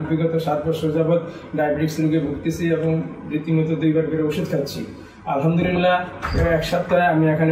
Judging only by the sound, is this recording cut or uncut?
uncut